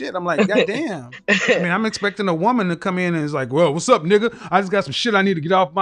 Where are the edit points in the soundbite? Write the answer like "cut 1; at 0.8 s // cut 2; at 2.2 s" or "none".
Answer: cut 1; at 1.1 s